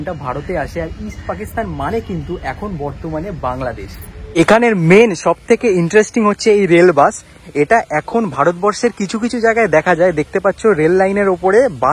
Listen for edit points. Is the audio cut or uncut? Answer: cut